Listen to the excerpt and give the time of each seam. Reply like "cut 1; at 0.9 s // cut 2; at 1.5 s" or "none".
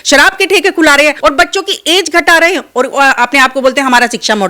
cut 1; at 1.2 s